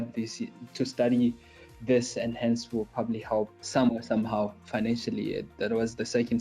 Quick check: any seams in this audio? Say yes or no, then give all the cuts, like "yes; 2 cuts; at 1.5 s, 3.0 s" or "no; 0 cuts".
yes; 1 cut; at 3.6 s